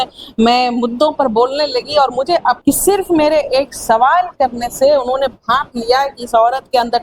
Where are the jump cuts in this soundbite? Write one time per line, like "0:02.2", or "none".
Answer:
0:02.6